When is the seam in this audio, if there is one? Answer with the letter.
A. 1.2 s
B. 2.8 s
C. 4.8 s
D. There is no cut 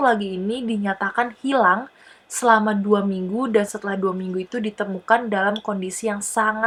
D